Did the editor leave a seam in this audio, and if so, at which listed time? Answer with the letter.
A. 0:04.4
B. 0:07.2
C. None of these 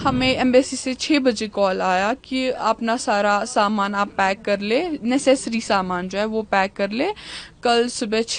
C